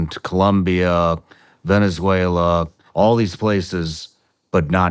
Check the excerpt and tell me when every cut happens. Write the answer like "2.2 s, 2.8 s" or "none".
2.8 s